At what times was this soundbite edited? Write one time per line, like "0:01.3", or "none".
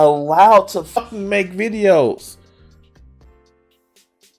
0:01.0